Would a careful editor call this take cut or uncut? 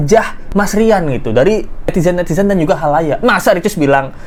uncut